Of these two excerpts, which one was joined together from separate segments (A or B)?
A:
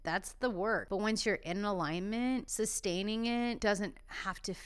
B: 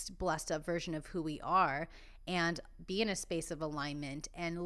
A